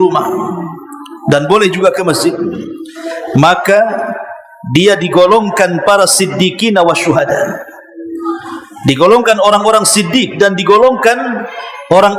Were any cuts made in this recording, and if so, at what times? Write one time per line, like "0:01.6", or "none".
none